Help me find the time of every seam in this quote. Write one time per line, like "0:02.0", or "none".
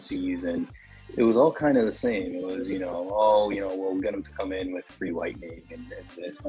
none